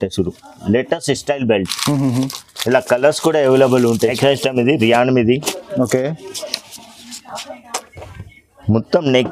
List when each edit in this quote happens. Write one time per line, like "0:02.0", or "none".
0:04.0

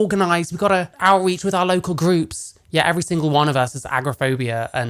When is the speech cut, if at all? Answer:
0:00.9

